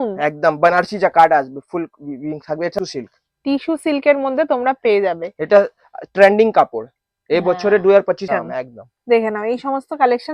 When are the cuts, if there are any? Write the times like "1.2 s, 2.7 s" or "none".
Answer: 2.7 s, 8.2 s